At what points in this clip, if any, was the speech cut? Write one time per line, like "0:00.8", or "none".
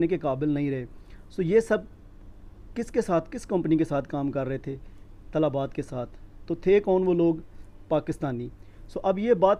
none